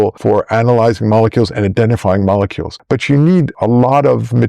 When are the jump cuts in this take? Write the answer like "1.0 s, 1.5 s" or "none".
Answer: none